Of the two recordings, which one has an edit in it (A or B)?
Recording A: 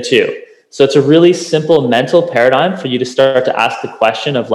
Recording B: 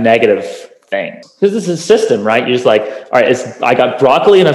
B